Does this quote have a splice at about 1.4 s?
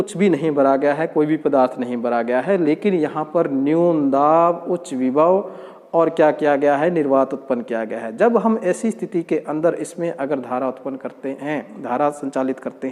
no; 0 cuts

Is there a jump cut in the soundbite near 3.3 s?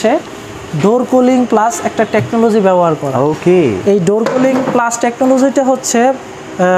no; 0 cuts

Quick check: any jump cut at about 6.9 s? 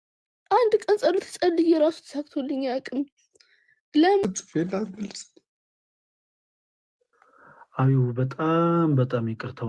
no; 1 cut; at 4.2 s

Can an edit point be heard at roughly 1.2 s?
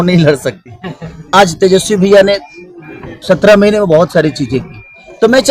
yes; 1 cut; at 1.2 s

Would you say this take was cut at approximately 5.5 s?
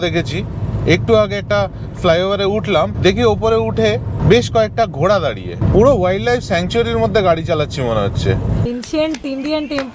yes; 2 cuts; at 5.5 s, 8.7 s

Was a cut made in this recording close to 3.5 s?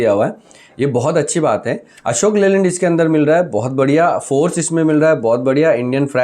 no; 0 cuts

